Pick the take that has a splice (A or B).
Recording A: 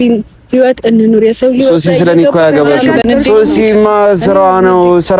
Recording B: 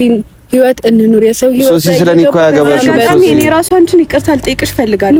A